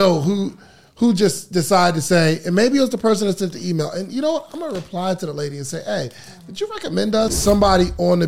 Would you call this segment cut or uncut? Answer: cut